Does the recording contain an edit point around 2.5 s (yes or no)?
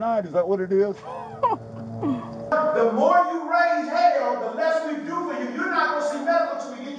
yes